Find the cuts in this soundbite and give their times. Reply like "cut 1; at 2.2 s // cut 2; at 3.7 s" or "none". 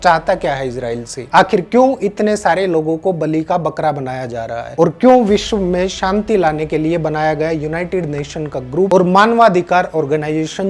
none